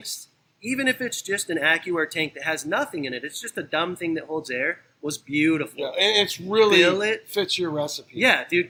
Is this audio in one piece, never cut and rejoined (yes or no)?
yes